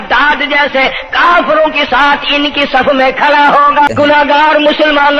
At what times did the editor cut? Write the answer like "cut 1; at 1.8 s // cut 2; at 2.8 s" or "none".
cut 1; at 3.9 s

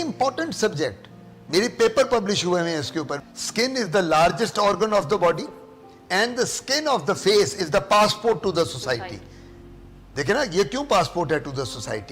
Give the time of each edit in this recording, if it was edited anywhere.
cut 1; at 3.1 s

